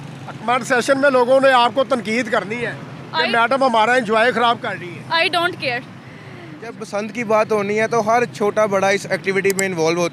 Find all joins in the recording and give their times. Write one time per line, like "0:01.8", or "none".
0:06.9